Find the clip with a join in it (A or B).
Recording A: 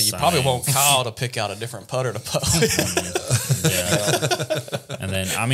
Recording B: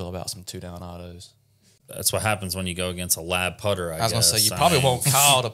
B